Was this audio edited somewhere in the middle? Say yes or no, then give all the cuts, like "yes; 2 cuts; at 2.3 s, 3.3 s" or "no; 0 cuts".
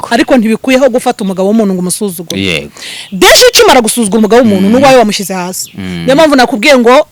no; 0 cuts